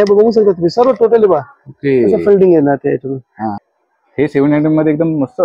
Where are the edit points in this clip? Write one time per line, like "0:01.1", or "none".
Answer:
0:03.5